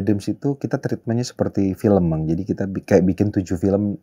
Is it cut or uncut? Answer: uncut